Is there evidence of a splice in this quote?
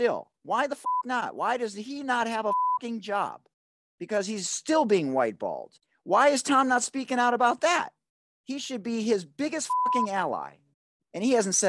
no; 0 cuts

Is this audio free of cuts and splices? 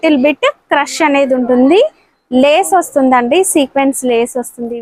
yes; 0 cuts

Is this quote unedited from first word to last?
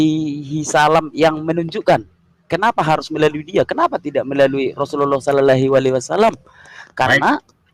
yes; 0 cuts

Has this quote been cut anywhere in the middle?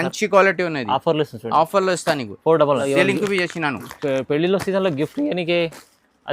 yes; 1 cut; at 2.8 s

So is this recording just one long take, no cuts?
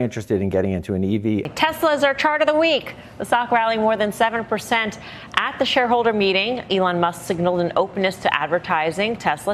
no; 1 cut; at 1.5 s

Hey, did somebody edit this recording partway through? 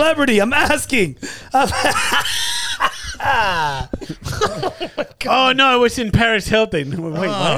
yes; 1 cut; at 4.0 s

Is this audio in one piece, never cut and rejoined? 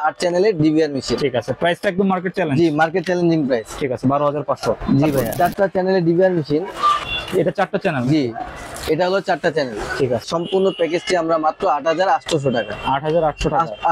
no; 3 cuts; at 5.4 s, 6.9 s, 10.2 s

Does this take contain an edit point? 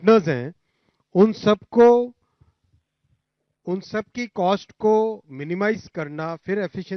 no; 0 cuts

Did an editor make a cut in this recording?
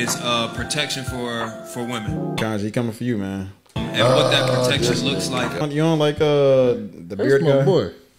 yes; 2 cuts; at 2.4 s, 5.6 s

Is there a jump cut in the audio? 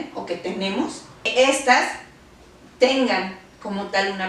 yes; 1 cut; at 1.3 s

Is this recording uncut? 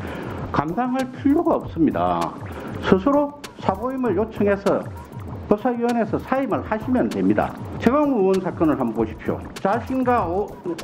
no; 2 cuts; at 7.6 s, 9.5 s

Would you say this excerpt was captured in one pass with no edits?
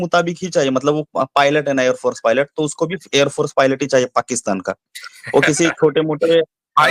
yes; 0 cuts

